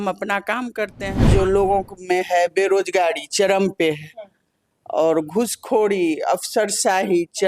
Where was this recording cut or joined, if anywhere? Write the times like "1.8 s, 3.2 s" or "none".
1.2 s